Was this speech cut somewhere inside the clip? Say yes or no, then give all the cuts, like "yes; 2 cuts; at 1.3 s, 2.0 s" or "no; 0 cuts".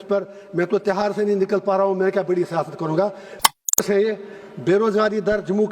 yes; 1 cut; at 3.4 s